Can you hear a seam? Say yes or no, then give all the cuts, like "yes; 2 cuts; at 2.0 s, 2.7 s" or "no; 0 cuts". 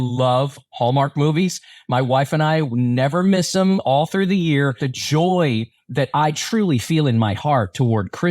yes; 1 cut; at 4.9 s